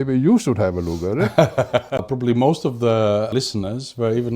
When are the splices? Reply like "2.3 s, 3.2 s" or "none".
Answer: 2.1 s, 3.3 s